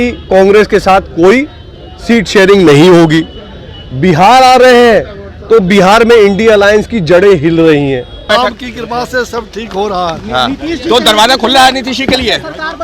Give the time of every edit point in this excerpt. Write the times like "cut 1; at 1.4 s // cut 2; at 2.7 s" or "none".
cut 1; at 8.2 s